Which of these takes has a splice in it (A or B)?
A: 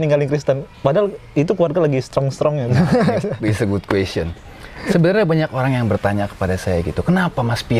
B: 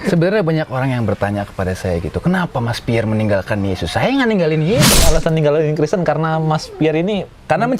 B